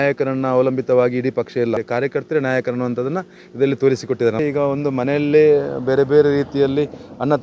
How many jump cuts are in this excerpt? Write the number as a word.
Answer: two